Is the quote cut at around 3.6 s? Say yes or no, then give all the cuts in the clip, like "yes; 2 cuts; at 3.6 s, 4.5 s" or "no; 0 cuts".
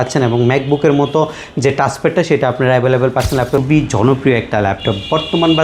yes; 1 cut; at 3.6 s